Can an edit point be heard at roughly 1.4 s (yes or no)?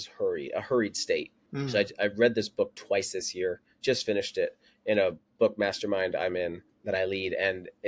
yes